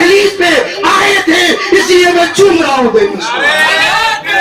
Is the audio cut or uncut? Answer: uncut